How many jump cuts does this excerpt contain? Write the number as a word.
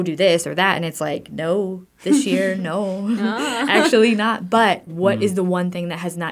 one